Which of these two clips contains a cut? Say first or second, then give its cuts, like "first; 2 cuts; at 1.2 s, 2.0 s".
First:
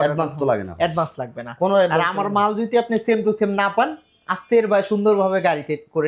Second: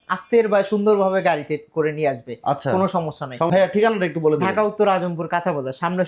second; 1 cut; at 3.5 s